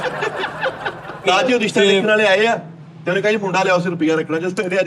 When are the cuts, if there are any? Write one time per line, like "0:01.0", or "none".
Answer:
0:01.2